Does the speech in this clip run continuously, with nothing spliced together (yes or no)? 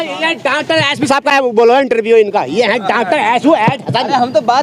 yes